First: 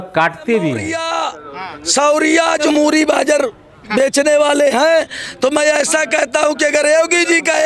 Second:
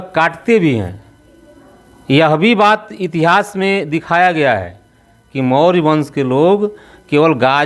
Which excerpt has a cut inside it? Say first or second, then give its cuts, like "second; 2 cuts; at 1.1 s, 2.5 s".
first; 2 cuts; at 1.0 s, 2.7 s